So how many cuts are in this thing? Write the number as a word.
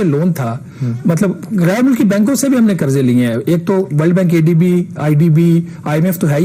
zero